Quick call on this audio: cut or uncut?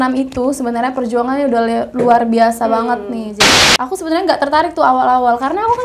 cut